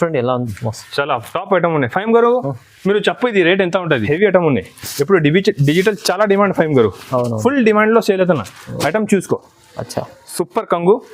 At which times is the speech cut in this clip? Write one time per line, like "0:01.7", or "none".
0:04.0